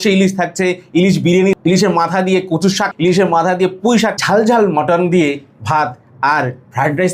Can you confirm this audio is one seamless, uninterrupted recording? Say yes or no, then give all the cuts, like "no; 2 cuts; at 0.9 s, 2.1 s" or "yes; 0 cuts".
no; 3 cuts; at 1.5 s, 2.9 s, 4.2 s